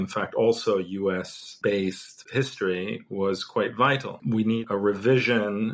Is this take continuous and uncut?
no; 3 cuts; at 1.4 s, 2.1 s, 4.1 s

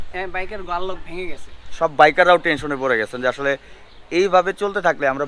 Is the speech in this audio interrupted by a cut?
yes; 1 cut; at 1.6 s

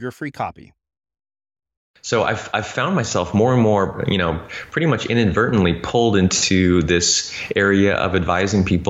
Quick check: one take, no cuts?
no; 1 cut; at 2.0 s

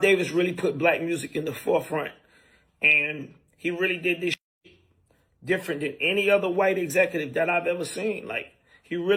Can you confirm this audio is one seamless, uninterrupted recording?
yes; 0 cuts

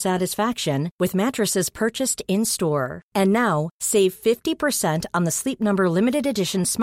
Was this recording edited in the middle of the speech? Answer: no; 0 cuts

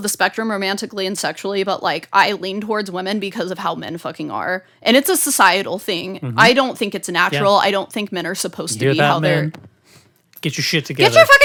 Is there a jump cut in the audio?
no; 0 cuts

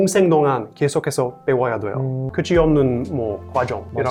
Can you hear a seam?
no; 0 cuts

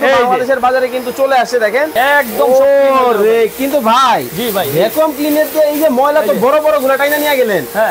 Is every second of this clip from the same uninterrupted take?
no; 1 cut; at 1.9 s

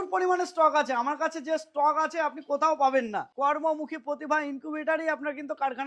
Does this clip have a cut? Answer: yes; 1 cut; at 3.3 s

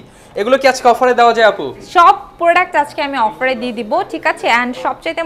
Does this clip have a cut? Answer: no; 0 cuts

